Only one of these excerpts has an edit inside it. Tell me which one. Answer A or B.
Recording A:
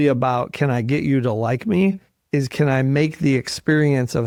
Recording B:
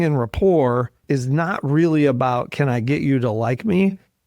B